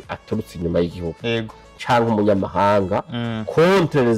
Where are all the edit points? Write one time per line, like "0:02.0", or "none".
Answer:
none